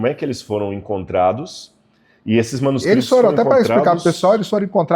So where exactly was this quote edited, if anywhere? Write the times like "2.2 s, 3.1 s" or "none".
none

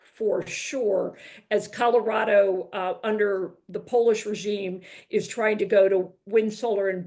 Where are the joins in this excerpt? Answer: none

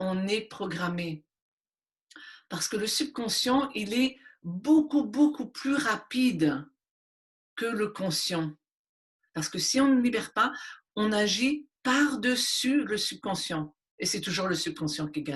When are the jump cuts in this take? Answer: 9.1 s

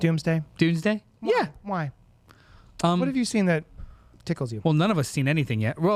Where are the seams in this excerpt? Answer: none

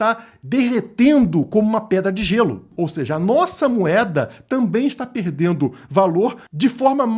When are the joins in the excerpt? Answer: 2.7 s

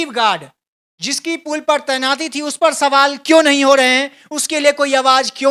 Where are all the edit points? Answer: none

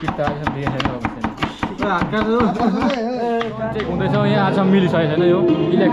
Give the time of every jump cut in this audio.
3.8 s

